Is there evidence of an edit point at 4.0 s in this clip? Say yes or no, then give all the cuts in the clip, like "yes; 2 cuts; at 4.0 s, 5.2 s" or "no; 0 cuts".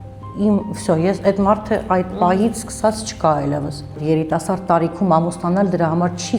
yes; 1 cut; at 4.0 s